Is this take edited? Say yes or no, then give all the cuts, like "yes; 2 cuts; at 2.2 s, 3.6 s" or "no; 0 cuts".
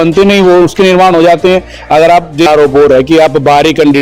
yes; 1 cut; at 2.5 s